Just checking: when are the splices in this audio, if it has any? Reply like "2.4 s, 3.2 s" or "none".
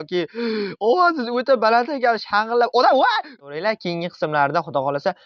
3.3 s